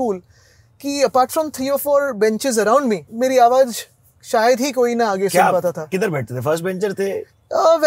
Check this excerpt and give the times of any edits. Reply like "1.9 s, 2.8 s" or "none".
3.1 s